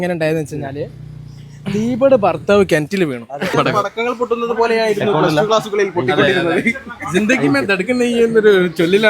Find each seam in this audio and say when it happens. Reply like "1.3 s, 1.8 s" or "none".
3.5 s